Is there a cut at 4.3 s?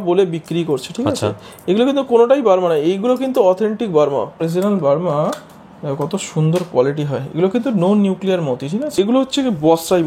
yes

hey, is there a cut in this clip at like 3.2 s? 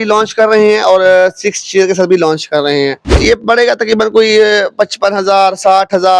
yes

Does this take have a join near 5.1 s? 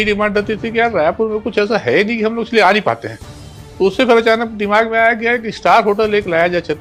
no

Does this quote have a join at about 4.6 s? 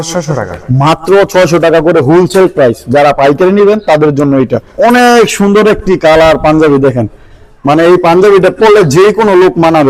yes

